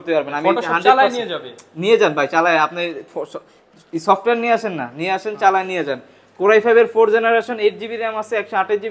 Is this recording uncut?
yes; 0 cuts

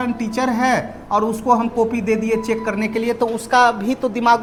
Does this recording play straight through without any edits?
yes; 0 cuts

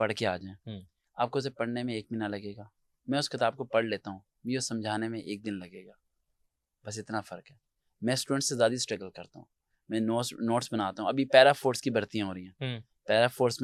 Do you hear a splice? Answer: no; 0 cuts

